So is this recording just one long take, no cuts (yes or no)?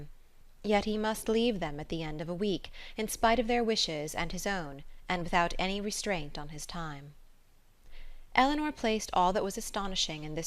no